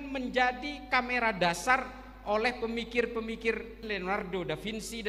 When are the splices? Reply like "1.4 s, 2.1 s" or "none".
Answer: 3.8 s